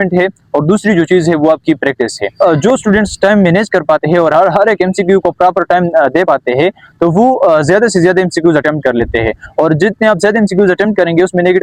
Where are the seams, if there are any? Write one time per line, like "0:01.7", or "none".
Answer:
0:02.4